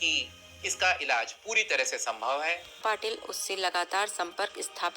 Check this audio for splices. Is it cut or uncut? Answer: cut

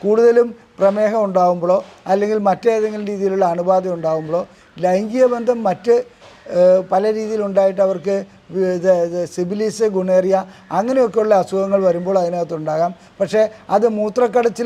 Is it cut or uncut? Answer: uncut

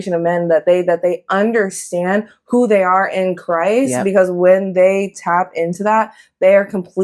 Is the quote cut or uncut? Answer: uncut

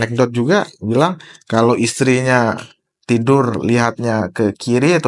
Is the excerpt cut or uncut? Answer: uncut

